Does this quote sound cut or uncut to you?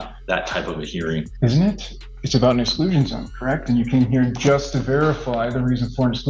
cut